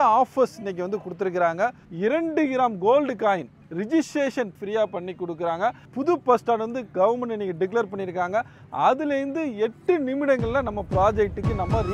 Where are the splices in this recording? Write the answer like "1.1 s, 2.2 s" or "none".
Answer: 1.8 s, 3.6 s, 4.5 s, 5.9 s